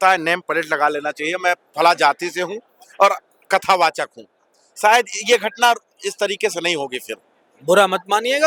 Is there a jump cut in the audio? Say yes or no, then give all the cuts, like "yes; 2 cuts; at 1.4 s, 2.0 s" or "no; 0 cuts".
no; 0 cuts